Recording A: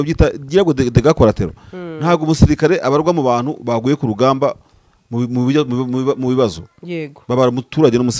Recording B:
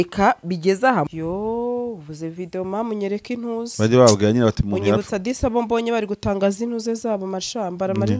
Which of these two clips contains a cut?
B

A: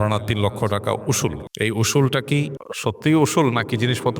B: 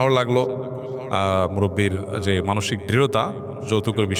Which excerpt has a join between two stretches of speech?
A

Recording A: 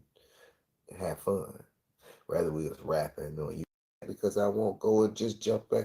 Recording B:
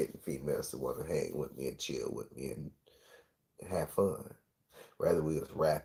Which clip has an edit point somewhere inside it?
A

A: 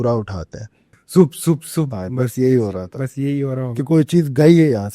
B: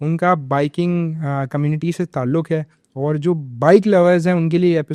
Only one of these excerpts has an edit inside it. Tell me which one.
A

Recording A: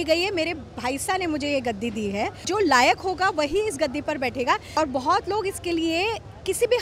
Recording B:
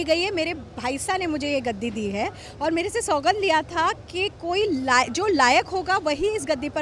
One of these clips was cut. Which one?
A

